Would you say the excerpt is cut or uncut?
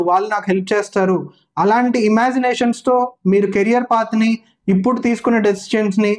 uncut